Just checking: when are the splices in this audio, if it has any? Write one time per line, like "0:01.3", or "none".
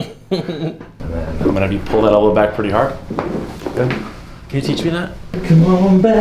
0:00.9
0:05.4